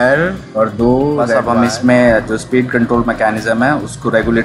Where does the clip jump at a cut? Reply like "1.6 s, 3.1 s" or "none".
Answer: 1.4 s